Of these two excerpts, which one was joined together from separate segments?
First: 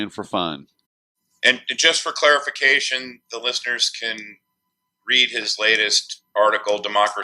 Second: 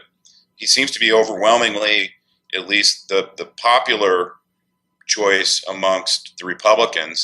first; 1 cut; at 1.9 s

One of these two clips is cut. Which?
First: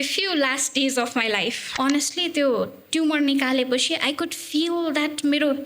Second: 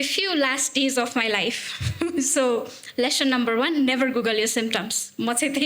first; 1 cut; at 1.6 s

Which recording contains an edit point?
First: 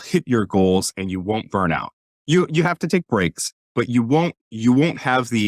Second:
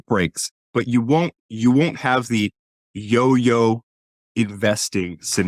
first; 1 cut; at 2.0 s

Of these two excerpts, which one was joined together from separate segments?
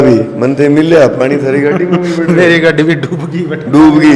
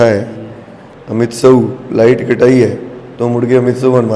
second; 1 cut; at 1.0 s

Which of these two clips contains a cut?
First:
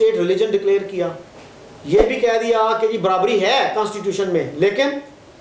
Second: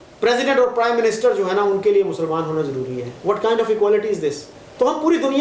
second; 1 cut; at 4.3 s

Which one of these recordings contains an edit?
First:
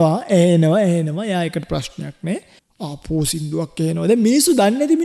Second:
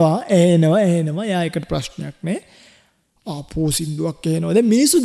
first; 1 cut; at 2.6 s

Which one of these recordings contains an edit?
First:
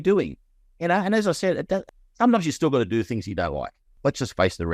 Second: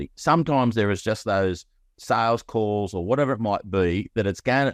first; 2 cuts; at 1.9 s, 3.9 s

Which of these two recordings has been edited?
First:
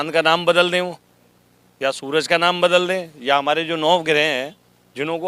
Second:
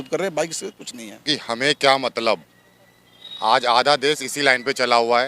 second; 1 cut; at 1.2 s

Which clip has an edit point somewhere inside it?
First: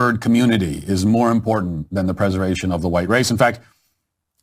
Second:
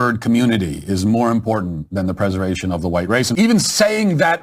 second; 1 cut; at 3.3 s

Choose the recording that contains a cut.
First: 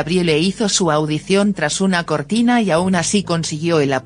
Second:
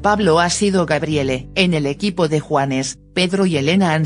first; 1 cut; at 2.0 s

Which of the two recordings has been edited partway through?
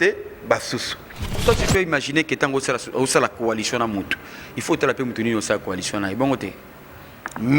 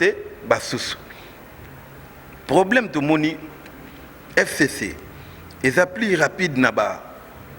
first; 1 cut; at 1.4 s

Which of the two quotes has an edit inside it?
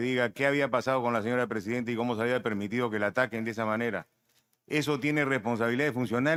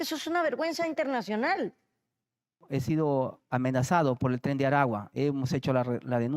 second; 1 cut; at 2.6 s

